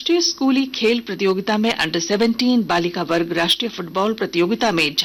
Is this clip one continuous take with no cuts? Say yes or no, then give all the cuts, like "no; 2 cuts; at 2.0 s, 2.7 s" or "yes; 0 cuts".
yes; 0 cuts